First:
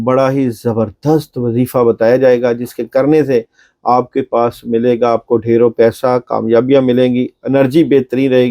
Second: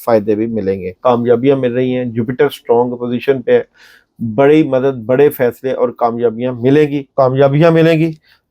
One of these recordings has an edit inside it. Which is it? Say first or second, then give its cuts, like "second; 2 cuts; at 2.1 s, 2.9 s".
second; 2 cuts; at 0.9 s, 7.1 s